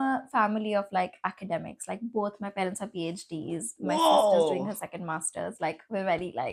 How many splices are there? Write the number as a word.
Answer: zero